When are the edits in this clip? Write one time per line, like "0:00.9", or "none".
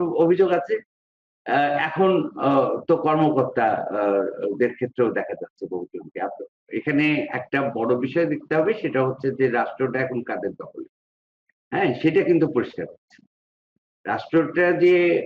0:06.7